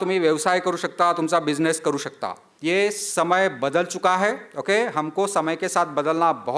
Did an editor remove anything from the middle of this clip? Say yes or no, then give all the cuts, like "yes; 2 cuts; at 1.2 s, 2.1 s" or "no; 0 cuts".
yes; 1 cut; at 2.4 s